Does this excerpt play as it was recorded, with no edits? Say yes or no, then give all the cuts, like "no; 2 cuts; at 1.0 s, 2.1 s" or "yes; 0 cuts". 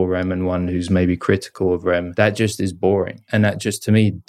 no; 2 cuts; at 2.1 s, 3.2 s